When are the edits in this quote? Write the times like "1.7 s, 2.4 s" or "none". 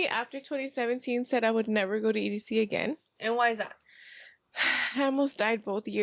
none